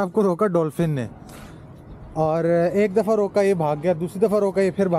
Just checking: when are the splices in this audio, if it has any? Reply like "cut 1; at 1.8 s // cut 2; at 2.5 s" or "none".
none